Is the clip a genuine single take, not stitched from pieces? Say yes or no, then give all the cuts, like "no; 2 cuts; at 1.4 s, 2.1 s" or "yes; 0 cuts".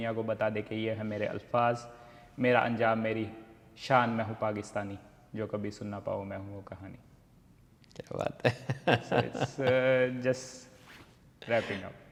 yes; 0 cuts